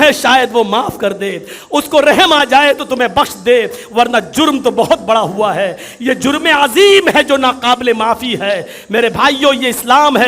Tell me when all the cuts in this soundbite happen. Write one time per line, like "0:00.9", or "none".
none